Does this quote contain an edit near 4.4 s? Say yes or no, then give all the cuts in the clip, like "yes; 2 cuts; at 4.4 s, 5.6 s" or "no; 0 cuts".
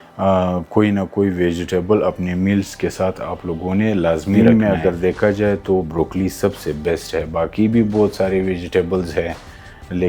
yes; 1 cut; at 4.4 s